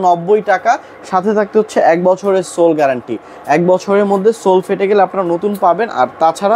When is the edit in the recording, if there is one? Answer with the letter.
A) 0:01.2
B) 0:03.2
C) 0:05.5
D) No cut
D